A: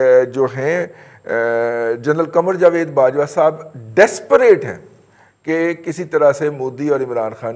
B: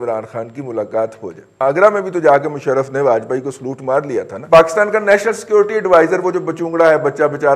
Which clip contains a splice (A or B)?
B